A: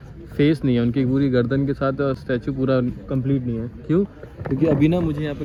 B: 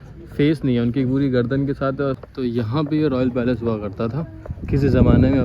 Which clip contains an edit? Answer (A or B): B